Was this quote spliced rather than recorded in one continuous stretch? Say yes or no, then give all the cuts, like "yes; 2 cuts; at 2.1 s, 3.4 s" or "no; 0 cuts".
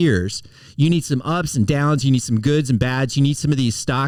no; 0 cuts